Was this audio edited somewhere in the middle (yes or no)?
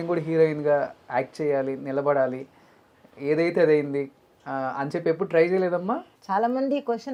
no